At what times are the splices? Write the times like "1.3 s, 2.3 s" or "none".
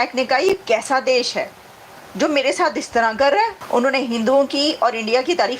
3.6 s